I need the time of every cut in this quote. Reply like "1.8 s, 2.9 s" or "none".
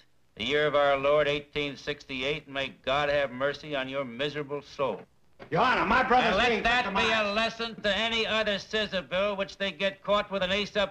4.7 s